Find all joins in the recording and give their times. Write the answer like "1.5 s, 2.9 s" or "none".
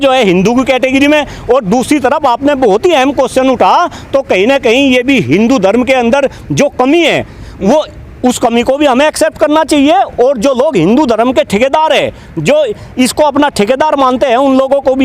none